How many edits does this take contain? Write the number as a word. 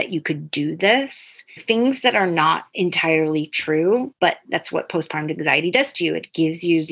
three